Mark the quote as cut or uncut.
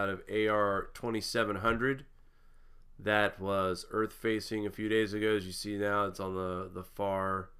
cut